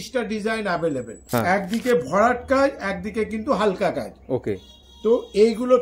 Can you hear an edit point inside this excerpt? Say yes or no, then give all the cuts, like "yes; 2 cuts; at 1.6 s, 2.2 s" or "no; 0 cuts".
yes; 1 cut; at 1.1 s